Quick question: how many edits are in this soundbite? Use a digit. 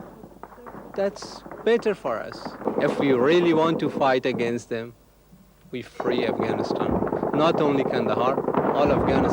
1